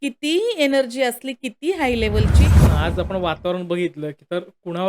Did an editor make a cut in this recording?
yes; 1 cut; at 2.6 s

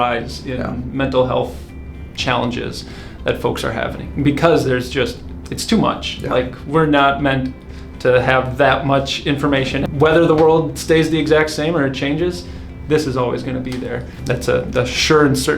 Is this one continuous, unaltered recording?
no; 2 cuts; at 9.8 s, 14.1 s

